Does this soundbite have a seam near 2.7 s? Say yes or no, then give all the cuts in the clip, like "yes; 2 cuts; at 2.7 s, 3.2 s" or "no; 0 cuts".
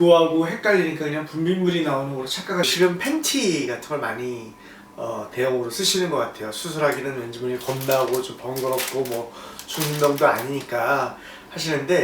yes; 1 cut; at 2.7 s